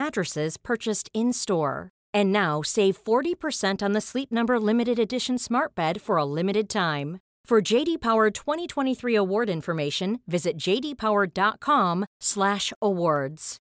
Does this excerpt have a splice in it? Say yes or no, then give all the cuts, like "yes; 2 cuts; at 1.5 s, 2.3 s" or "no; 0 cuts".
no; 0 cuts